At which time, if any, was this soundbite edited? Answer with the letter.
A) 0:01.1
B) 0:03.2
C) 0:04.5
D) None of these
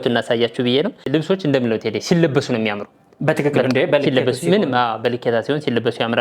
A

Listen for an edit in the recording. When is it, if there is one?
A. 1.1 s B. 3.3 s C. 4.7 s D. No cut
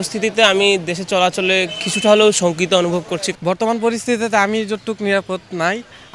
B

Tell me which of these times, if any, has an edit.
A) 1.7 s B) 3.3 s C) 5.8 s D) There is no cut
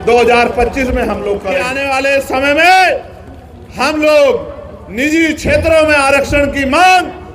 A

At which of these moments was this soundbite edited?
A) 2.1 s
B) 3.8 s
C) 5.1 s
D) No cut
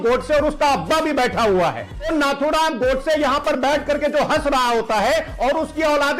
A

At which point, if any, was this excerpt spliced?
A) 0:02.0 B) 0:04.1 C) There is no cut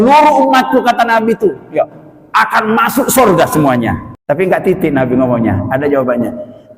B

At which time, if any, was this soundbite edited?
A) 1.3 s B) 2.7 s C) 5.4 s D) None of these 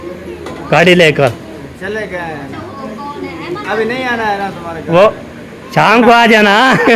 B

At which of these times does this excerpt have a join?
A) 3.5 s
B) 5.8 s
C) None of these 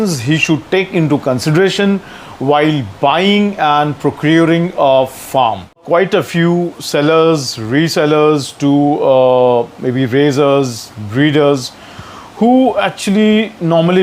B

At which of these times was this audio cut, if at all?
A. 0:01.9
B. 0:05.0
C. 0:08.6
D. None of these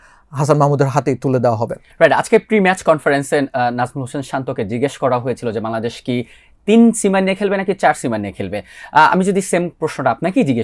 D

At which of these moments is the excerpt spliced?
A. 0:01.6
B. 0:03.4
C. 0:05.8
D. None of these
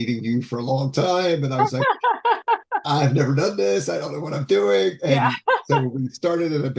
D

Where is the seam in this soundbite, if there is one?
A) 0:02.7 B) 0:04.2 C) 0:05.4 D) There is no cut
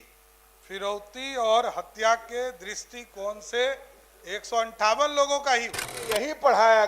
C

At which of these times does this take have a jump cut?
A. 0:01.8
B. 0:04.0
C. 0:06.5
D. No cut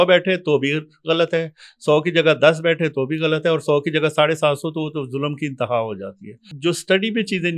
C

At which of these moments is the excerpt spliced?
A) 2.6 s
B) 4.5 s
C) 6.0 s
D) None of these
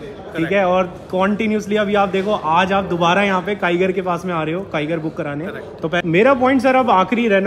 C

